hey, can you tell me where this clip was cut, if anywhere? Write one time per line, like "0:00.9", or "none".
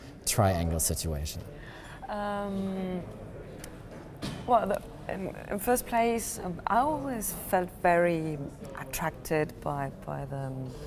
0:06.2